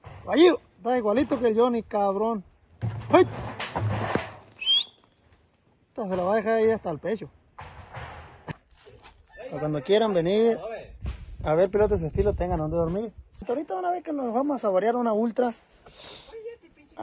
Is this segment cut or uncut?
cut